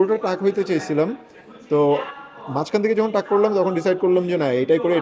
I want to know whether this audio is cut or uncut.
uncut